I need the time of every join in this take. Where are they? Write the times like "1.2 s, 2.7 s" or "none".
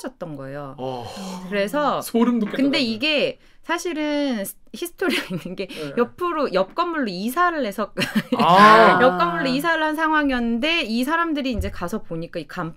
none